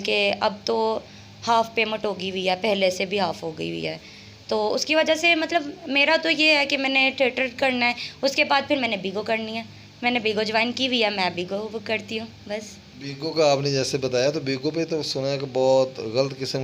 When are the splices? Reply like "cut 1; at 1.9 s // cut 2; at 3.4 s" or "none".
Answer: none